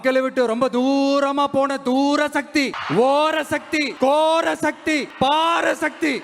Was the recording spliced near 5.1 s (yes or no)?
yes